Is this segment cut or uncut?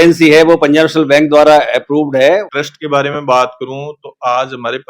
cut